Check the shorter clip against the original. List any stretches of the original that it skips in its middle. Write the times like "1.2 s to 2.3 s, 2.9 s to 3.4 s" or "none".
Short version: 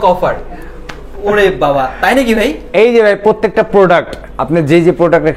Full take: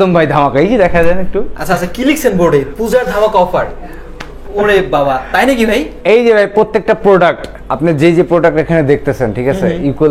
none